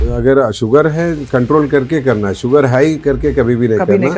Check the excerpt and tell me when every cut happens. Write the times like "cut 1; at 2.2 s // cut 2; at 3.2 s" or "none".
none